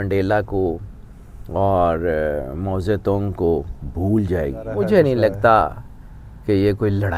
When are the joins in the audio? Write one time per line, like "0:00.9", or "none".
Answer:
0:04.7